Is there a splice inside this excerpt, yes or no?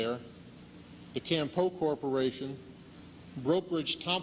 yes